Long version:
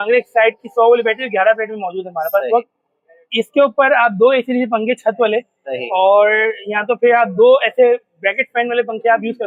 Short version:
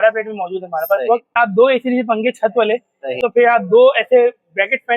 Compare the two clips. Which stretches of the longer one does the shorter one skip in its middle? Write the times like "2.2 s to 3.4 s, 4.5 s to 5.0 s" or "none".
2.8 s to 4.0 s, 5.8 s to 6.8 s